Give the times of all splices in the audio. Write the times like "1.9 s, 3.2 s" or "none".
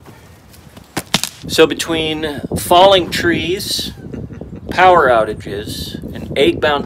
1.4 s

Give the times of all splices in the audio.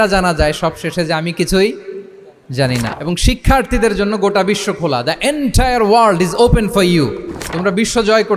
2.9 s

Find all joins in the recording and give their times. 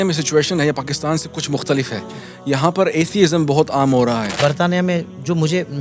4.3 s

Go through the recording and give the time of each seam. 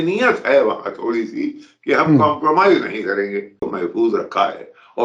3.6 s

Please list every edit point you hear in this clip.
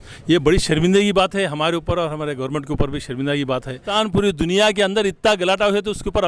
3.9 s

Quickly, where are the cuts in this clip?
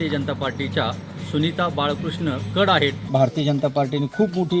3.1 s

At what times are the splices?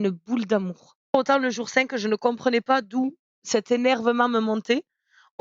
1.1 s

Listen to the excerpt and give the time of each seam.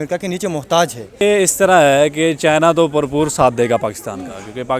1.2 s

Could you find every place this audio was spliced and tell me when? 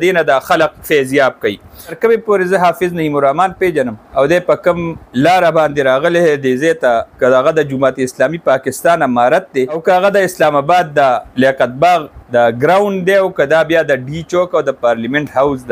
2.0 s, 4.0 s, 5.0 s, 7.1 s, 9.8 s, 11.3 s, 12.2 s

